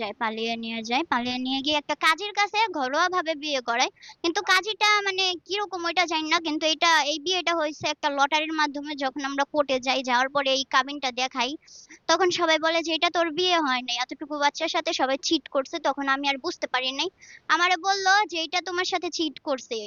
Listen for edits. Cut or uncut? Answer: uncut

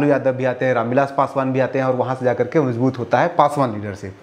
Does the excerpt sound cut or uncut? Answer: uncut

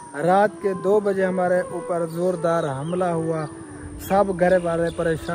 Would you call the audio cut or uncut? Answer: uncut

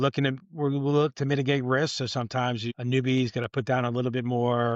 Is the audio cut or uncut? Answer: cut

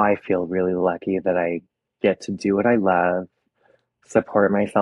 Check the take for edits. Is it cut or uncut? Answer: uncut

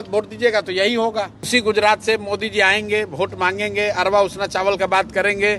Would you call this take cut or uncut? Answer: cut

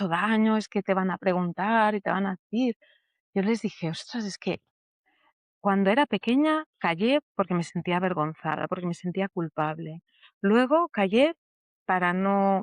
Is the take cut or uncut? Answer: uncut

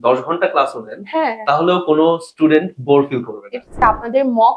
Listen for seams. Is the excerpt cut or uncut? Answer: cut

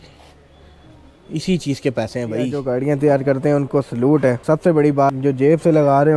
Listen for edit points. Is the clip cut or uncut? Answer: cut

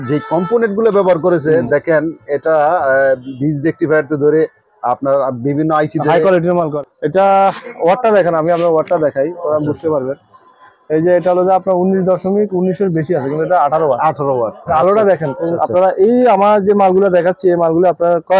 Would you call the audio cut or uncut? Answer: cut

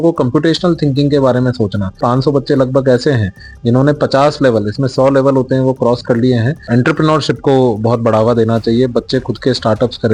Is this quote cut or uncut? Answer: cut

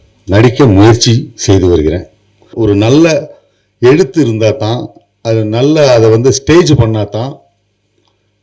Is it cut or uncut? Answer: cut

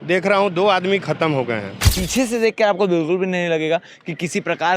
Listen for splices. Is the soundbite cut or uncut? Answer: cut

